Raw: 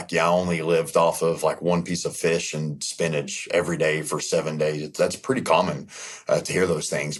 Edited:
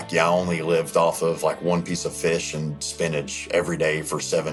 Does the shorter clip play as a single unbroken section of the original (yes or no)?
yes